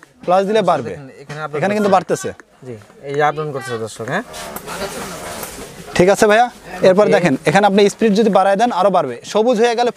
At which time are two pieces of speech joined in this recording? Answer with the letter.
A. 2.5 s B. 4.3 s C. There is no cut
B